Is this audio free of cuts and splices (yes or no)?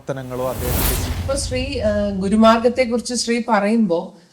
no